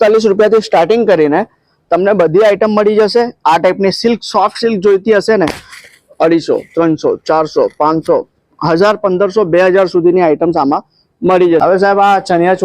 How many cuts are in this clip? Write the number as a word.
one